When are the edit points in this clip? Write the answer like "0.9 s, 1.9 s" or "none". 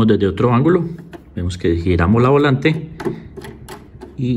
none